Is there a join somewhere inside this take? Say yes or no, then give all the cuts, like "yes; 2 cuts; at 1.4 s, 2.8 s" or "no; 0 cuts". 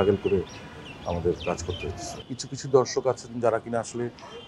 yes; 1 cut; at 2.1 s